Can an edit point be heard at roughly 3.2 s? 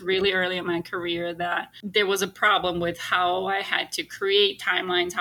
no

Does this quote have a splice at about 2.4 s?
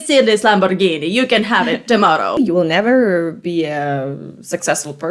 yes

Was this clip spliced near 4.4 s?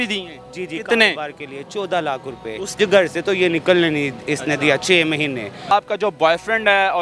no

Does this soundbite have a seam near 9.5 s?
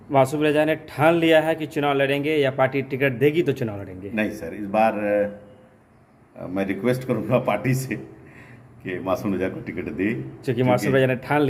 no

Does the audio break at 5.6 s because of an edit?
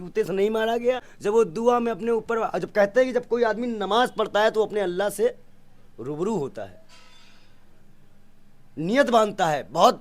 no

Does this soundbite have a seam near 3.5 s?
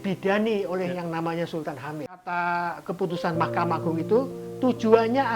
no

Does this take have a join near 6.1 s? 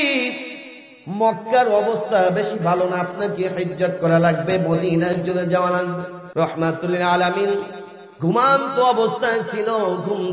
yes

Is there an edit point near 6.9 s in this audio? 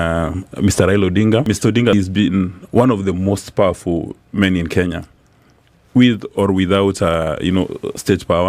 no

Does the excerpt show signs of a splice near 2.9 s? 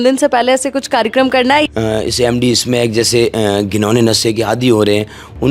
no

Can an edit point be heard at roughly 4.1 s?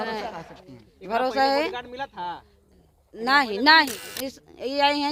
yes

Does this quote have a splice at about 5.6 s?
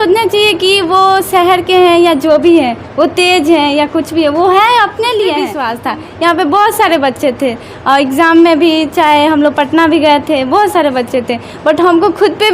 yes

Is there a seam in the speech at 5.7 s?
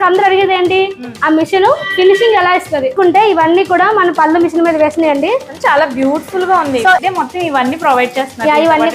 no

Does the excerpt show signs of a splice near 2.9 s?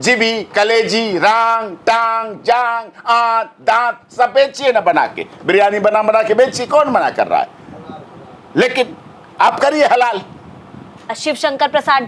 no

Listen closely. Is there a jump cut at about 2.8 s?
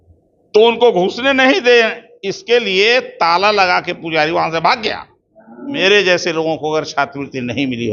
no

